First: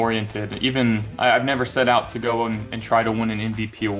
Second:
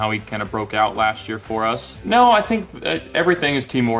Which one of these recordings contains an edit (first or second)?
second